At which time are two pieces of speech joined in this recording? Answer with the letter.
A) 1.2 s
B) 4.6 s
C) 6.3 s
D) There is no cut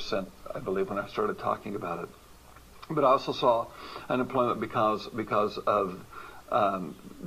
B